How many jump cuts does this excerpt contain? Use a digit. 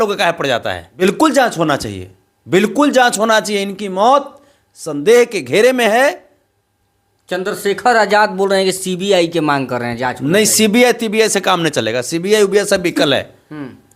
1